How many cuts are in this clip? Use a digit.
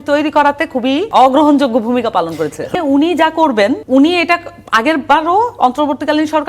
3